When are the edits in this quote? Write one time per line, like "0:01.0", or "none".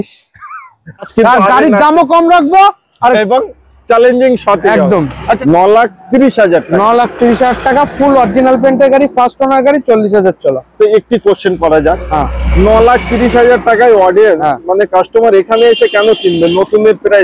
0:01.1
0:05.4